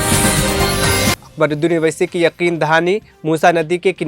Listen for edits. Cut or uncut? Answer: cut